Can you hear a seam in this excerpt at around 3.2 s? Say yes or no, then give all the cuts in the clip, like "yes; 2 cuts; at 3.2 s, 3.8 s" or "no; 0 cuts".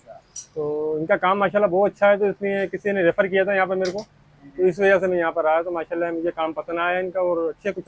no; 0 cuts